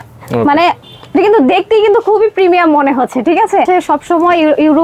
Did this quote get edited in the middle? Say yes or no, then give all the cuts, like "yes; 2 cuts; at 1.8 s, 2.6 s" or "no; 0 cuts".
yes; 1 cut; at 3.7 s